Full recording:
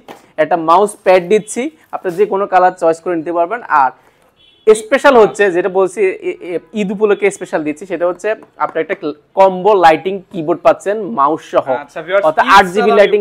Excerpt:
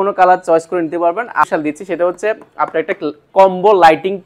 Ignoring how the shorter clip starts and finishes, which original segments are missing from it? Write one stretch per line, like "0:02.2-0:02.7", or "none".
0:03.8-0:07.4